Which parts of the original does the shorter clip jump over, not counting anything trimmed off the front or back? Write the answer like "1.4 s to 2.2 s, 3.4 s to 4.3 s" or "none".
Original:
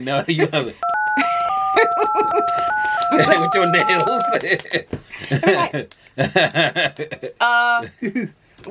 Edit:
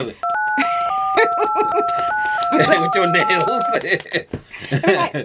none